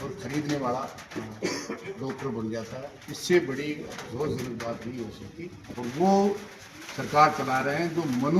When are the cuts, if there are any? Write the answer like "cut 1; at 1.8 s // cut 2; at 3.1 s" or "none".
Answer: cut 1; at 5.6 s